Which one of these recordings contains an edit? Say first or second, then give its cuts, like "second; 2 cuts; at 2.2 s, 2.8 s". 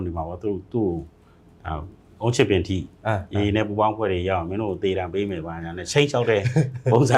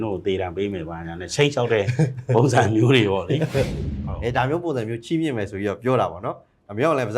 second; 1 cut; at 3.8 s